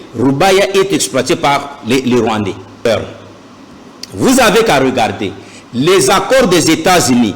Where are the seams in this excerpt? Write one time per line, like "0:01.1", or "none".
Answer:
0:02.9